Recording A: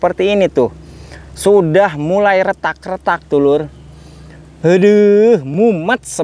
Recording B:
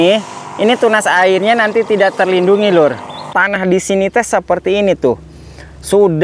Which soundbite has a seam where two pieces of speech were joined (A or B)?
B